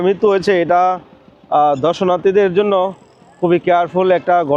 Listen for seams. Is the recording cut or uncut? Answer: uncut